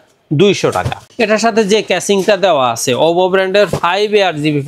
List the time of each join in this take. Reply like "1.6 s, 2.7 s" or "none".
1.0 s